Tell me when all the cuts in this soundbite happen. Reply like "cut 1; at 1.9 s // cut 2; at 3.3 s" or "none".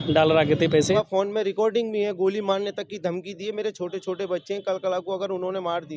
cut 1; at 1.0 s